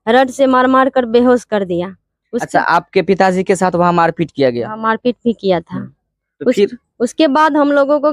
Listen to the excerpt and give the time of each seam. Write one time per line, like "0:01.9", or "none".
none